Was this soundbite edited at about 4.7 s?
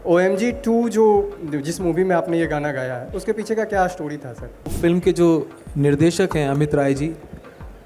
yes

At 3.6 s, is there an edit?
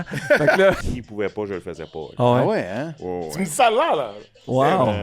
no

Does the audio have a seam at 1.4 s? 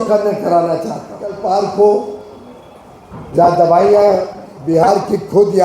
yes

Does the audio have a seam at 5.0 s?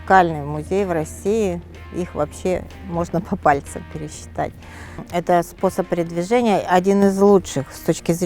yes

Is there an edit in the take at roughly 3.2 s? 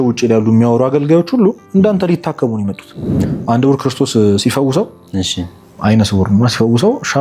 yes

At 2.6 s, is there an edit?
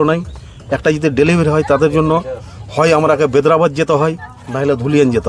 no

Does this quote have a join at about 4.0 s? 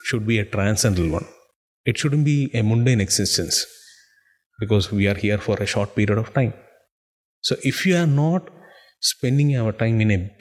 no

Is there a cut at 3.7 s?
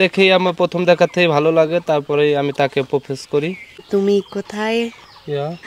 yes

